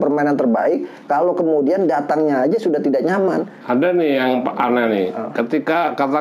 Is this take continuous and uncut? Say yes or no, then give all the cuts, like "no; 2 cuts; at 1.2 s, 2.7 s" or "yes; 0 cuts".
yes; 0 cuts